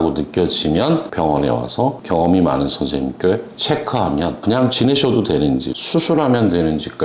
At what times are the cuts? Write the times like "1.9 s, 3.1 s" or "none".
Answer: 1.1 s, 5.7 s